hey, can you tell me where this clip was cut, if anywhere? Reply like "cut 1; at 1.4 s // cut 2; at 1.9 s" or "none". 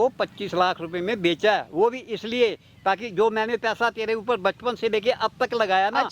none